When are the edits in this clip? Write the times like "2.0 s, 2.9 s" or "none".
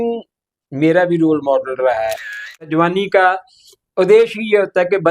2.7 s